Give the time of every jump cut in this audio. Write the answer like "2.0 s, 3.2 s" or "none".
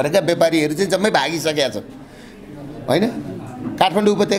none